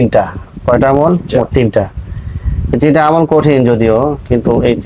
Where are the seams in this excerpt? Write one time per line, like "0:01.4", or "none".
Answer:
none